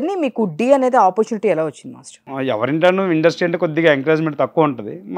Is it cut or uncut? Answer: cut